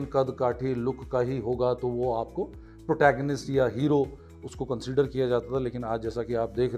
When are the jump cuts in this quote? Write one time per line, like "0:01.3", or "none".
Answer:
none